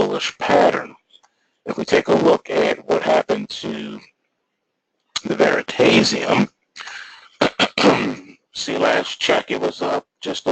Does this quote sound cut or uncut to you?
cut